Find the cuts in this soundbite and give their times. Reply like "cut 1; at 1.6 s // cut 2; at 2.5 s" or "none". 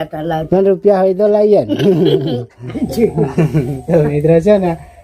cut 1; at 2.7 s